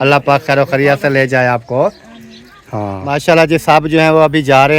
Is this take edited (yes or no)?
yes